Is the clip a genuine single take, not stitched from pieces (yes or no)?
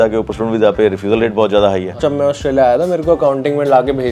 no